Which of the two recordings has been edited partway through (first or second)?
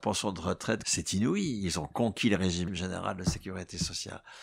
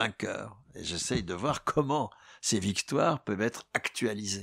first